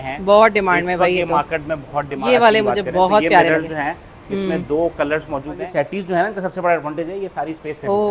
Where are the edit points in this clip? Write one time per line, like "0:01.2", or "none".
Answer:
0:02.2
0:05.7